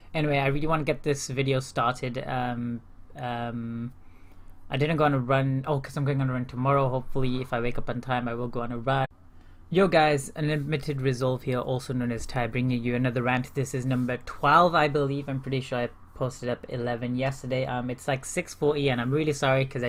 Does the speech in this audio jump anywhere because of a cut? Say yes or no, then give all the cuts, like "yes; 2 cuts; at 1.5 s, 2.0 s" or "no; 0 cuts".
no; 0 cuts